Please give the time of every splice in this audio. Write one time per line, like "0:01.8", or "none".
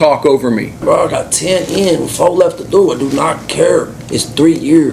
0:00.8
0:04.0

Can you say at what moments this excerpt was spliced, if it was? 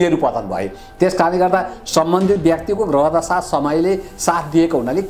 none

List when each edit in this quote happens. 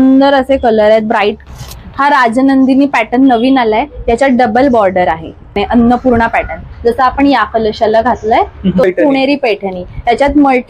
0:01.4
0:05.6
0:08.8

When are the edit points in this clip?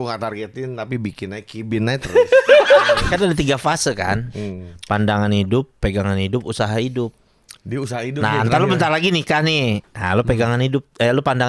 0:03.0

